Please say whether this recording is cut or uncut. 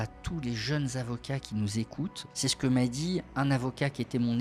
cut